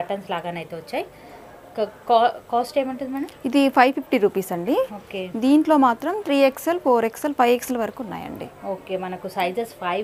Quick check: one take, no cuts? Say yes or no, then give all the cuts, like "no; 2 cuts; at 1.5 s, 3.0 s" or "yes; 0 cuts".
yes; 0 cuts